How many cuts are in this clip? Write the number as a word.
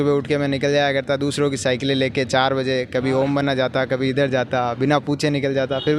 zero